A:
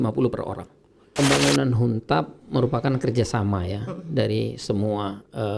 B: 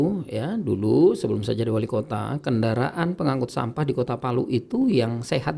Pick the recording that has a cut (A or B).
A